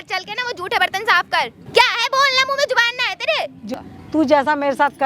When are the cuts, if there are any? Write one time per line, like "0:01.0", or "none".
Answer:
0:01.6
0:03.7